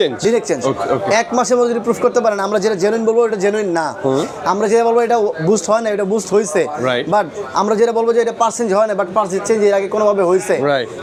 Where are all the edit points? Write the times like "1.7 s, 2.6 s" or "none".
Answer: none